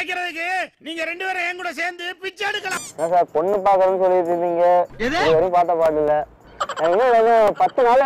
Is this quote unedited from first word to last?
no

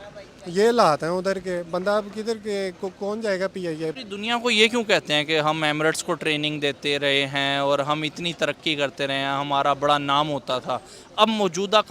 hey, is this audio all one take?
no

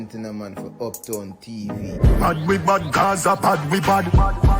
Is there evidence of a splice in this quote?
no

